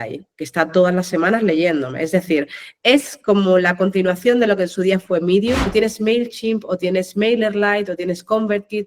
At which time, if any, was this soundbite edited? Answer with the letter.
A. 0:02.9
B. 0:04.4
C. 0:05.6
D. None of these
C